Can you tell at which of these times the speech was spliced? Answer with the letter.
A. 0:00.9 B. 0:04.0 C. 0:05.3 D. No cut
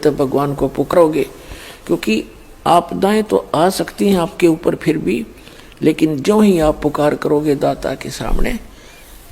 A